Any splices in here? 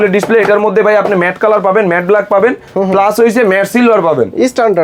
no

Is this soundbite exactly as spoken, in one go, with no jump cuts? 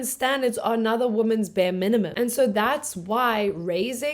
no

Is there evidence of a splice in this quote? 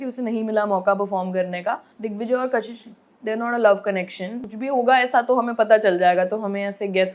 yes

